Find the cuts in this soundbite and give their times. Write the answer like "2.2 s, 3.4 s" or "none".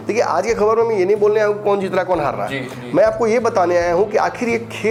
none

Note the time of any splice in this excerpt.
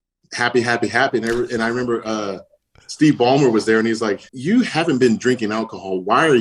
4.3 s

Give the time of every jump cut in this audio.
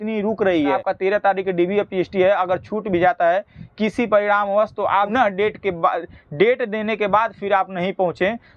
0.8 s, 5.1 s

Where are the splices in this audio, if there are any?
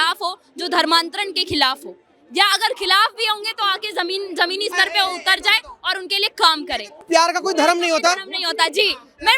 7.0 s

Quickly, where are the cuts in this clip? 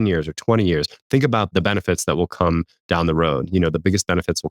1.5 s

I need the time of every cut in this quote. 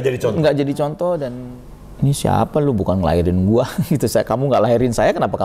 1.3 s

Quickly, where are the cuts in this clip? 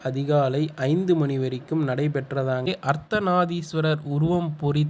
2.7 s

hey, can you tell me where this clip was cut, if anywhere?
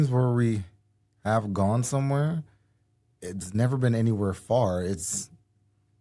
none

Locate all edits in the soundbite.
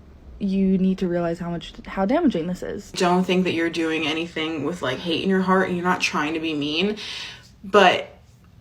2.9 s

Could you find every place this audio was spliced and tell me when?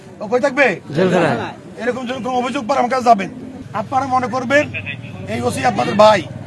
3.7 s

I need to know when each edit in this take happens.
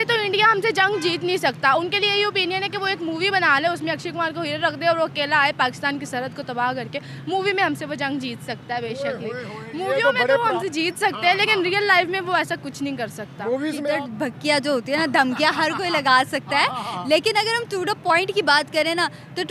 13.8 s

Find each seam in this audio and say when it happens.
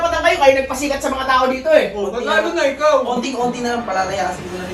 none

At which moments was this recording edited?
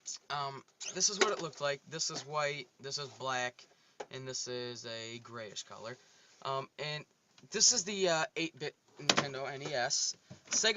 none

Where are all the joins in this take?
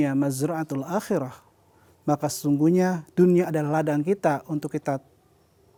none

